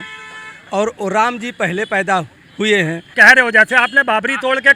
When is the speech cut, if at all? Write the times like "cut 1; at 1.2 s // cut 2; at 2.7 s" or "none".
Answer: cut 1; at 3.1 s

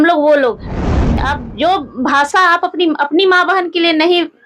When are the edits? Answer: cut 1; at 1.2 s

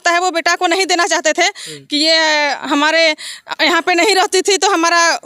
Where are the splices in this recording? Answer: none

